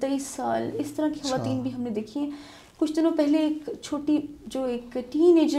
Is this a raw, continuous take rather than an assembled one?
yes; 0 cuts

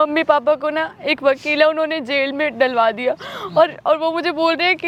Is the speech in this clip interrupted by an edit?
no; 0 cuts

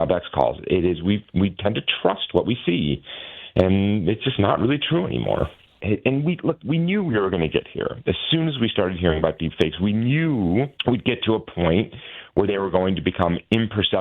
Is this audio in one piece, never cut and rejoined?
no; 2 cuts; at 5.8 s, 10.7 s

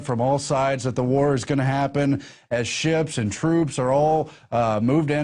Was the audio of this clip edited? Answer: no; 0 cuts

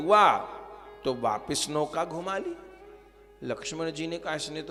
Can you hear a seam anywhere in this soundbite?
no; 0 cuts

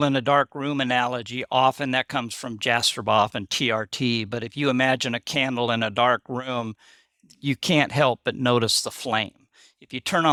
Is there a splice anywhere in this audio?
no; 0 cuts

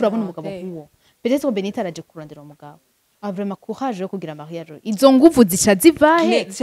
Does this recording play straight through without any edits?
yes; 0 cuts

